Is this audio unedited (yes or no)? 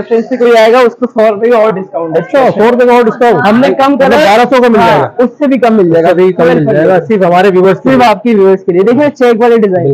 yes